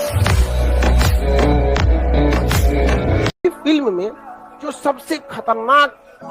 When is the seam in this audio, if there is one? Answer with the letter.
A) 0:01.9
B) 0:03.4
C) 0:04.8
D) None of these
B